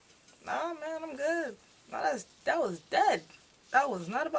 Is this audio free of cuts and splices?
yes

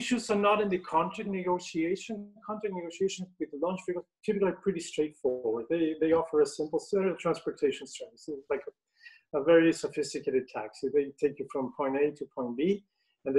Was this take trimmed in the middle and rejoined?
no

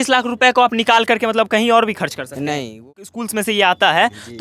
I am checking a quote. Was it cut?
yes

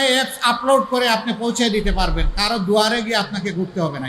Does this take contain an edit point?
no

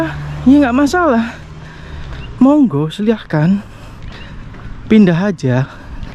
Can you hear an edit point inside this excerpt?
no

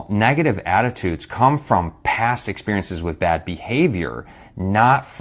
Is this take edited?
no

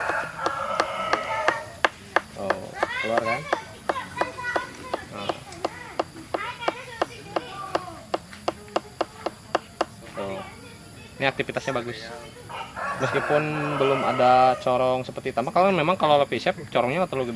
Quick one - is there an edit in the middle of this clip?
no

